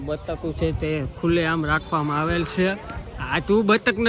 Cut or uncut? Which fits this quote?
uncut